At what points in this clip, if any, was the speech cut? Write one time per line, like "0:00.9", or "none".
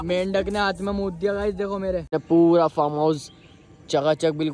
0:02.1